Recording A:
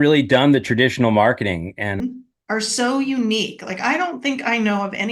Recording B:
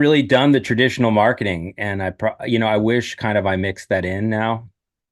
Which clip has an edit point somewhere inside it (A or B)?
A